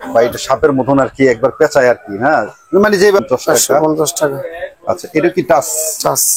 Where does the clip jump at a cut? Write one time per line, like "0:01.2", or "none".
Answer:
0:03.2